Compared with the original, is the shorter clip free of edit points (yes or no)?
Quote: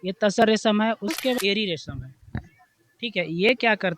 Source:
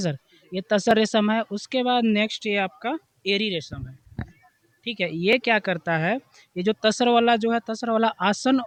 no